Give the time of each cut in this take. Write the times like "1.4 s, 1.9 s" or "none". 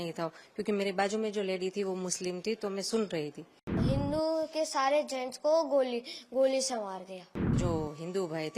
3.8 s, 7.6 s